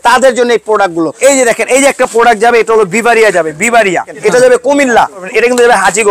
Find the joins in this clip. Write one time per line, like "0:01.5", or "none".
0:01.1
0:04.1
0:05.3